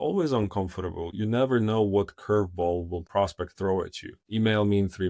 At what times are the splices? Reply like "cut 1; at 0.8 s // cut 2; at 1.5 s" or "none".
cut 1; at 1.1 s // cut 2; at 3.0 s // cut 3; at 4.2 s